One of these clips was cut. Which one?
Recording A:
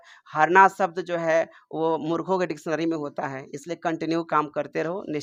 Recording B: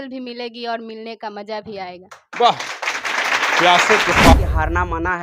B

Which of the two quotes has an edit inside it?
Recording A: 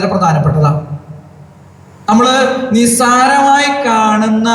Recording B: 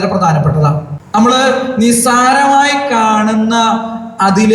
B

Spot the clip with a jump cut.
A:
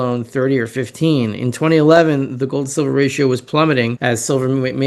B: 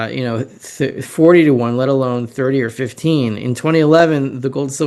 A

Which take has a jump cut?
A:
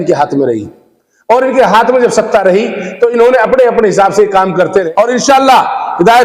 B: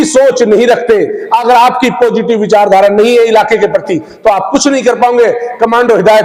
A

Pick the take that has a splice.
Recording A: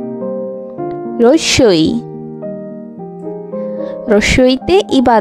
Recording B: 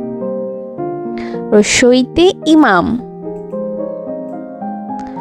B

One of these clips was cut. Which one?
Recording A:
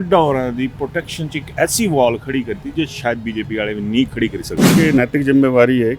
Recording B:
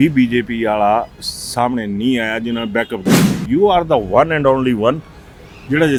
A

